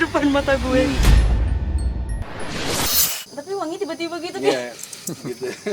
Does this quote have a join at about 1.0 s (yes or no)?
yes